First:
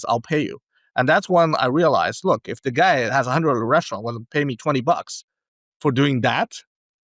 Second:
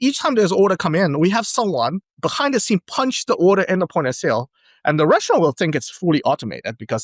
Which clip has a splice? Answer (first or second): second